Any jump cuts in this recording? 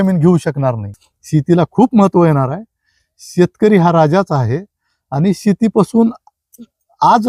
no; 0 cuts

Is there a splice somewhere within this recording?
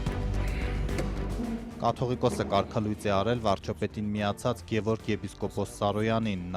yes; 1 cut; at 1.1 s

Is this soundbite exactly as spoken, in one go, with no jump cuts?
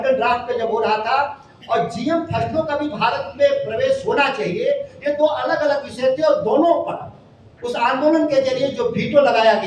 yes; 0 cuts

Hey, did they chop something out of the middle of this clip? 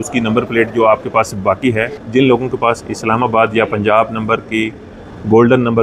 yes; 1 cut; at 2.0 s

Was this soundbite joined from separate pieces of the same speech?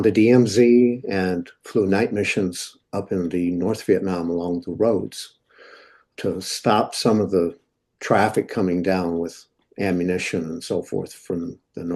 yes; 1 cut; at 6.1 s

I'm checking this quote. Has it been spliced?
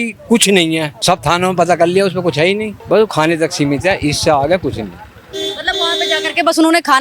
yes; 2 cuts; at 0.9 s, 2.7 s

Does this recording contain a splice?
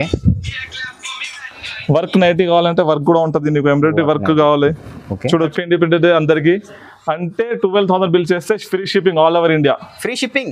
yes; 1 cut; at 5.5 s

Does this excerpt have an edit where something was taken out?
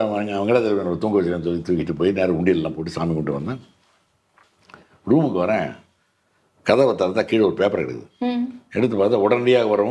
no; 0 cuts

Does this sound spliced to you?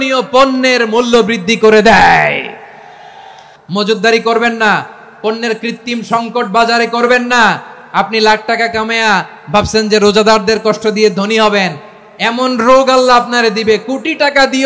yes; 1 cut; at 3.5 s

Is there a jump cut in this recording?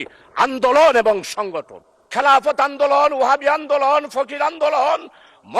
yes; 1 cut; at 2.1 s

